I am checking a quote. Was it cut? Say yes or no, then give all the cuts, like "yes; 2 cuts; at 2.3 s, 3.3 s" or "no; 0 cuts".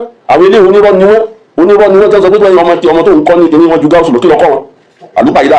no; 0 cuts